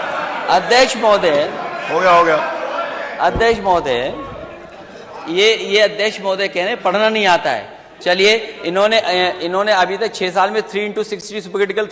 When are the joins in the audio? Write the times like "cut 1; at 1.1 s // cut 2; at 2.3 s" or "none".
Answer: none